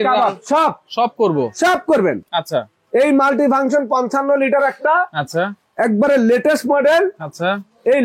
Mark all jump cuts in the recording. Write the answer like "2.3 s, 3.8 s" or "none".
none